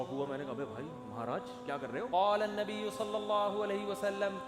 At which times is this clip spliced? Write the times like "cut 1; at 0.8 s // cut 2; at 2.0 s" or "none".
cut 1; at 2.1 s